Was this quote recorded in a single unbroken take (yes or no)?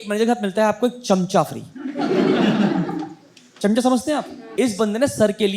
no